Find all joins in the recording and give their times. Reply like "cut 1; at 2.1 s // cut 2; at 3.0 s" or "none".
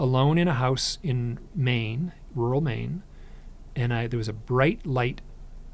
none